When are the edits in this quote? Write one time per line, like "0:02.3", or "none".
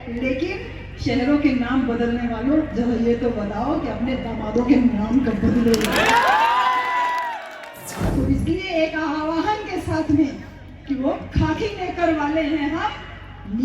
0:07.9